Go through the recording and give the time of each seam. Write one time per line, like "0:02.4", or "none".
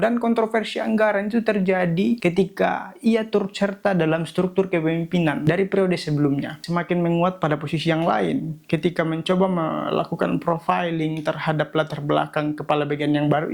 0:05.4
0:06.5